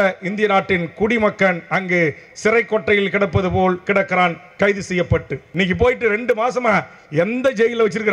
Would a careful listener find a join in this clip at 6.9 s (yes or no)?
no